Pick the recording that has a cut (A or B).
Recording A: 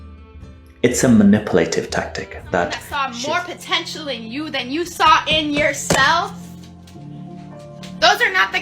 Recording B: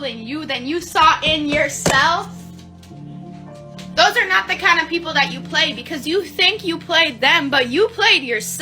A